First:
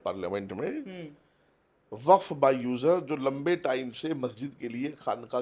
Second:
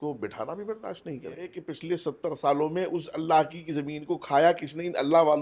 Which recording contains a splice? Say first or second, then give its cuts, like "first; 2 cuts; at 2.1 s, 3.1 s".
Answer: second; 1 cut; at 1.7 s